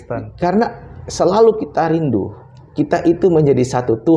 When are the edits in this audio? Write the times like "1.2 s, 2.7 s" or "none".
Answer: none